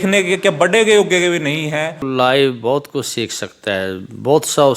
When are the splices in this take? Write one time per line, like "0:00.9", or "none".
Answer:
0:02.0